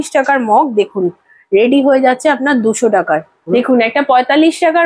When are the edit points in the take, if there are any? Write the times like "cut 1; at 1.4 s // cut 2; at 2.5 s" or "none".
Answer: cut 1; at 3.9 s

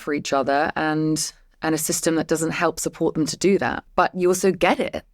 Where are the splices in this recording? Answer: cut 1; at 3.8 s

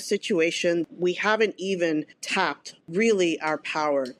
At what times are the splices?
none

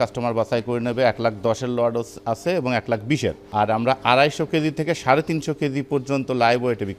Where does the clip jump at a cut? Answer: none

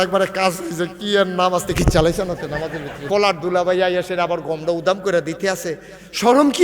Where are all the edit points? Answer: cut 1; at 2.9 s

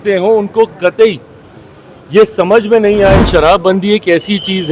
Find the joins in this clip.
cut 1; at 3.2 s

